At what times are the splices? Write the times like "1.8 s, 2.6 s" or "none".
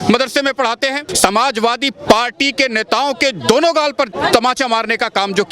1.1 s, 4.1 s

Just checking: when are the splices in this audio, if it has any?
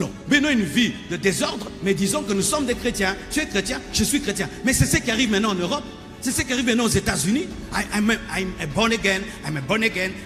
none

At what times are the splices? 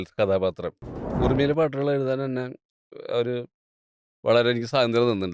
1.1 s

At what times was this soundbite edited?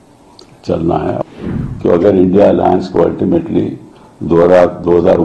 1.2 s

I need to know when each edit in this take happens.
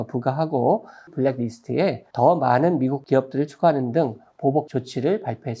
1.1 s, 2.0 s, 3.0 s, 4.7 s

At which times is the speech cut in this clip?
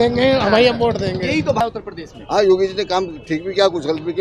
1.6 s

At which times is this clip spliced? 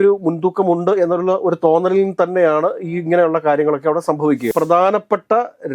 4.5 s

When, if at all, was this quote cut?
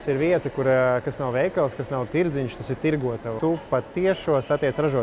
3.3 s

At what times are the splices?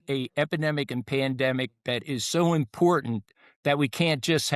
none

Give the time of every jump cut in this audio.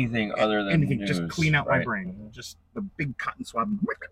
none

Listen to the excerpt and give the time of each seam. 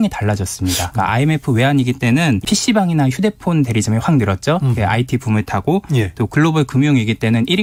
none

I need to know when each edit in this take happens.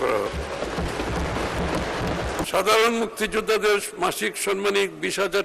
2.4 s

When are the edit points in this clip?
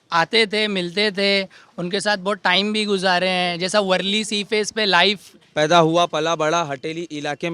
5.3 s

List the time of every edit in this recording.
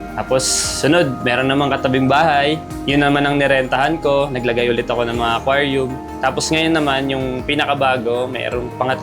6.1 s

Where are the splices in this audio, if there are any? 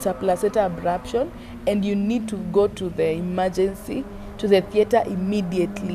none

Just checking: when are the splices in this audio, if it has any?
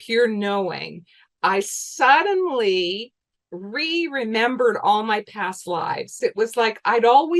6.2 s

